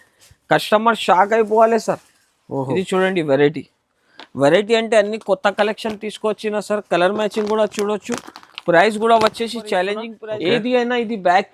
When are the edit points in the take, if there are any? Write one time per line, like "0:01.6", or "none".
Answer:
0:10.1